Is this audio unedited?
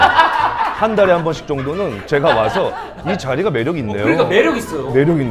yes; 0 cuts

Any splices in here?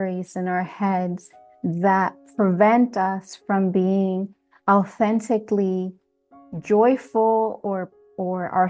no; 0 cuts

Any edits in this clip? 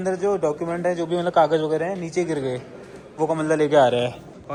no; 0 cuts

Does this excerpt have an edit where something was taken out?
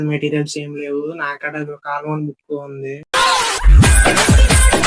yes; 1 cut; at 3.0 s

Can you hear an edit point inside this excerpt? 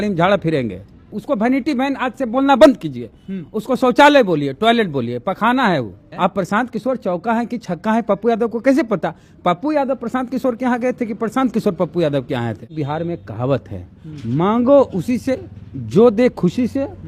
yes; 3 cuts; at 1.1 s, 6.0 s, 12.7 s

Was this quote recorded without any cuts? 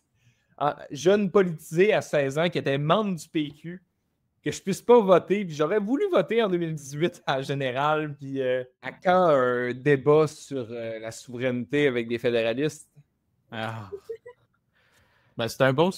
no; 1 cut; at 8.8 s

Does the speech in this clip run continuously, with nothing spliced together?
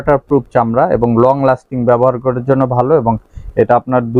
yes; 0 cuts

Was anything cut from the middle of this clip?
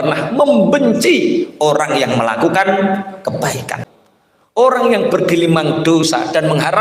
yes; 1 cut; at 3.8 s

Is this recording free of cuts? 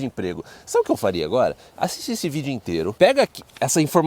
no; 1 cut; at 2.9 s

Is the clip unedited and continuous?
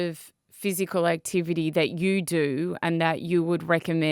yes; 0 cuts

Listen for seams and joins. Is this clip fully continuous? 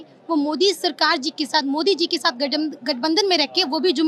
yes; 0 cuts

